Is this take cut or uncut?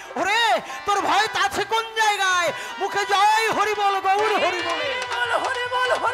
uncut